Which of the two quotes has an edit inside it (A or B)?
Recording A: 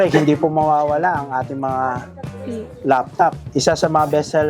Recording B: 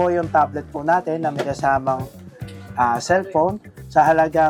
A